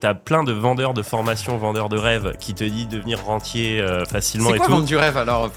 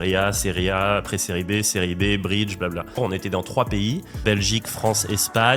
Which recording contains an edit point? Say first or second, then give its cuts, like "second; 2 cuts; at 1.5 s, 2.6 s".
second; 2 cuts; at 3.0 s, 4.2 s